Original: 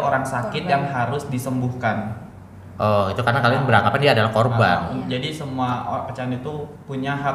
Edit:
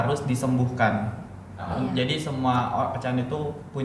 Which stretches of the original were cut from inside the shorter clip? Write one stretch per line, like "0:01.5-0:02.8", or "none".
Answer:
0:02.7-0:04.8